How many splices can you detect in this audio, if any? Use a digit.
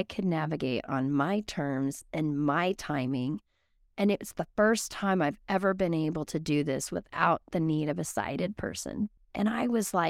1